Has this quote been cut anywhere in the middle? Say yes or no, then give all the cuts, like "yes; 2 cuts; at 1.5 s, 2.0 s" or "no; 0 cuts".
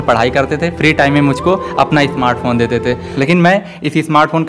yes; 1 cut; at 3.1 s